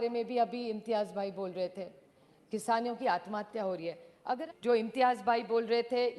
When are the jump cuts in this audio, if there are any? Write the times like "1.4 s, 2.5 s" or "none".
4.4 s